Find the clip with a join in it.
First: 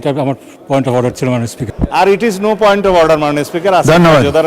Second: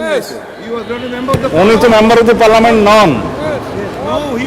first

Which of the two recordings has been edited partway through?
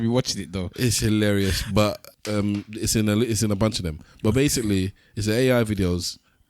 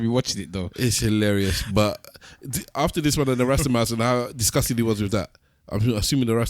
first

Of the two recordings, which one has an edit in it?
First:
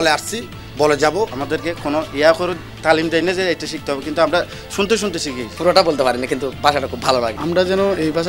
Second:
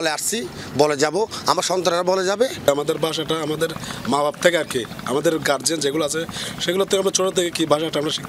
first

